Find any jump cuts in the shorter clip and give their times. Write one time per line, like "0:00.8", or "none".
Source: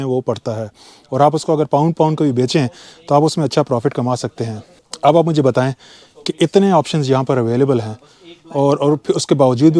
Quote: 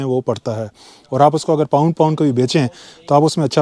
none